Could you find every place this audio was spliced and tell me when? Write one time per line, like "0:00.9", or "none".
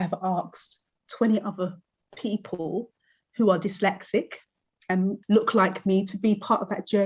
0:05.2